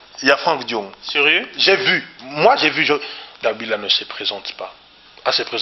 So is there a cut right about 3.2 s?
yes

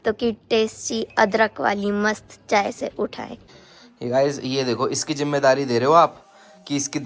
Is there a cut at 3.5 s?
yes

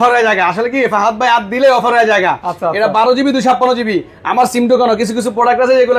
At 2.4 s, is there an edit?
no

